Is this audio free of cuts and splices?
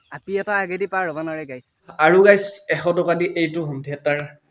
no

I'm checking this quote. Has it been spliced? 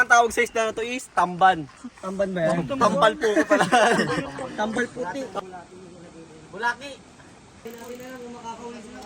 yes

